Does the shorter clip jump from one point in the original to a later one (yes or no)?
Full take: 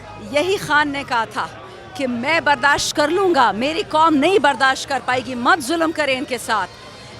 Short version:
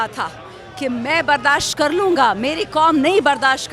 no